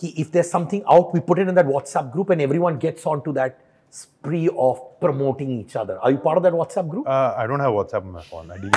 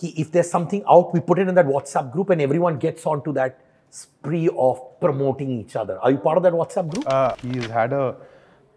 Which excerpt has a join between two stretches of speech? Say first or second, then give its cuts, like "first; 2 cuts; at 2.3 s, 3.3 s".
second; 1 cut; at 7.3 s